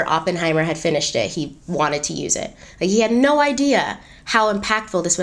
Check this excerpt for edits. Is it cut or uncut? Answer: uncut